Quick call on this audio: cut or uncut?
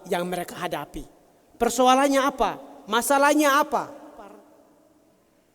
cut